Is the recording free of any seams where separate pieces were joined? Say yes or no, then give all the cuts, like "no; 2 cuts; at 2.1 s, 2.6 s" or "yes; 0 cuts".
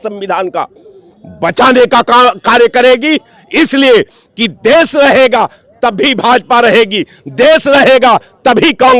yes; 0 cuts